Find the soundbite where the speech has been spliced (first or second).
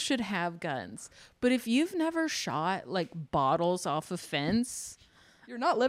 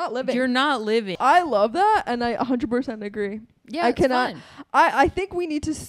second